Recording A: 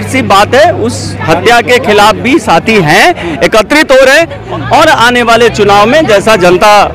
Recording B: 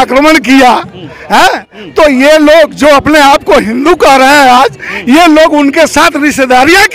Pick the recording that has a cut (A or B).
A